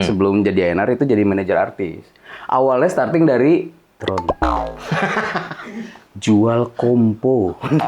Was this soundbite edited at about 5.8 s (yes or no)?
no